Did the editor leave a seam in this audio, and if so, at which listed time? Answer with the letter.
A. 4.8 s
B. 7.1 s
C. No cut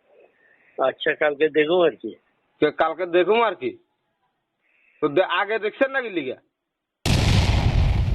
B